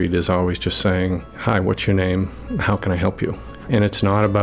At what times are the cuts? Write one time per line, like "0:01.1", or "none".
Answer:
0:01.3
0:03.5